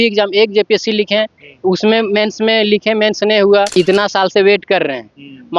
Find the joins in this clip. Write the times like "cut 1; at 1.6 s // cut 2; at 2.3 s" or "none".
cut 1; at 3.8 s

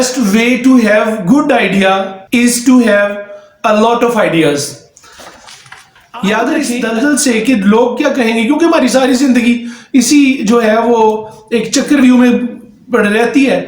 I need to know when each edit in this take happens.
cut 1; at 2.2 s // cut 2; at 6.8 s

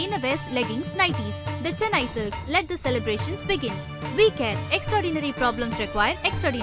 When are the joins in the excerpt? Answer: none

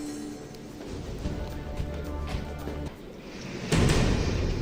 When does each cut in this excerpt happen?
cut 1; at 1.8 s

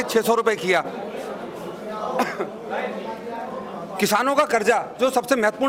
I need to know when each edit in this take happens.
none

